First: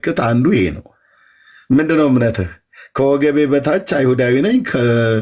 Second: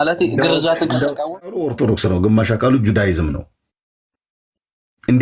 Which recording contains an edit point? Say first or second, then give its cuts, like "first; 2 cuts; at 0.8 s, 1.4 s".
second; 1 cut; at 1.3 s